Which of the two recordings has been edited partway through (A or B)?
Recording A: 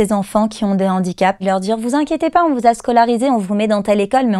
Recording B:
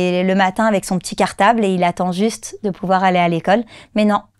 A